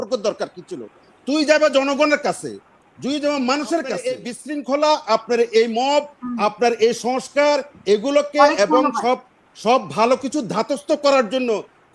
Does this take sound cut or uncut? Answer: cut